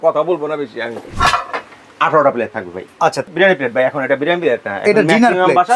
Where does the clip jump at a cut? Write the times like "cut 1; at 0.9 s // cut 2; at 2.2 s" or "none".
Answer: cut 1; at 1.0 s // cut 2; at 3.3 s